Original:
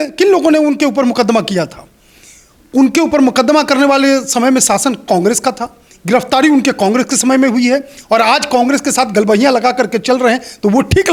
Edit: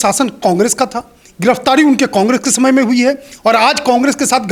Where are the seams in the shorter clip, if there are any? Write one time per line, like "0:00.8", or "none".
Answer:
none